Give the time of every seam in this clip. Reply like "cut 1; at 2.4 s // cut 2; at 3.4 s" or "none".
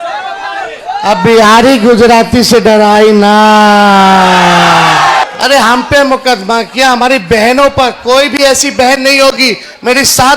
cut 1; at 5.2 s

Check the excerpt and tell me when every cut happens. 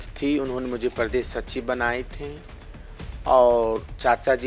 none

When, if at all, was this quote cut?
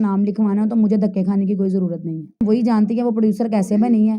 cut 1; at 2.4 s

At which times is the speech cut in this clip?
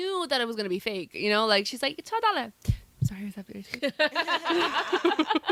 none

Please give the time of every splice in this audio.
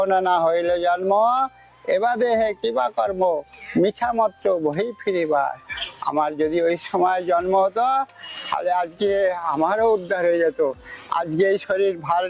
none

